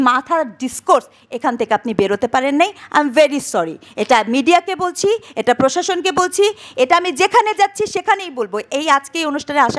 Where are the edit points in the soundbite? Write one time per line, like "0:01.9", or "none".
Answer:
none

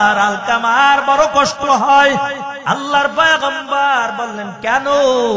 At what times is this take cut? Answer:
0:02.5

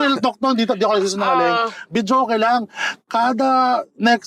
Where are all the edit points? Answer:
none

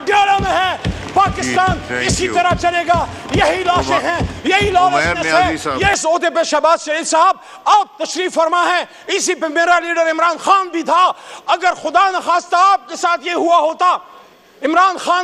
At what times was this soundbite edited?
0:06.0

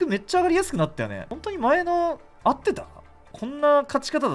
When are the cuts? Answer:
0:01.2
0:03.2

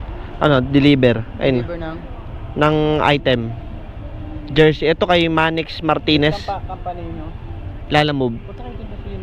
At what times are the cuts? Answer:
none

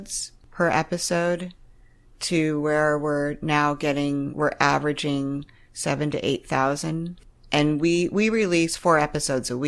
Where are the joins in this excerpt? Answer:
none

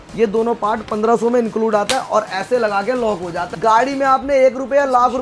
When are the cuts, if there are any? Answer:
0:03.4

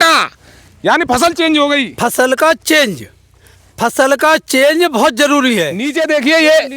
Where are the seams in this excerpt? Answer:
0:05.8

